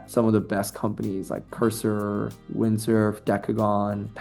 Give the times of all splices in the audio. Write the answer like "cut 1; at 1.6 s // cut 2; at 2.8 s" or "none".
none